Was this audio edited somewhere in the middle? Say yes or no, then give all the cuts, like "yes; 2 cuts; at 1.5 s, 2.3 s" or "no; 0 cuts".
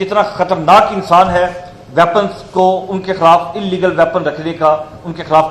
no; 0 cuts